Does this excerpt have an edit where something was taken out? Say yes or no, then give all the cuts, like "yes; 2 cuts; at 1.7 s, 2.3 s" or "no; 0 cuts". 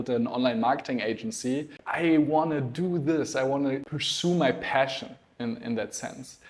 yes; 2 cuts; at 1.8 s, 4.0 s